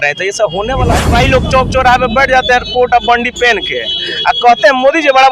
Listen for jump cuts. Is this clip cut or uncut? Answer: cut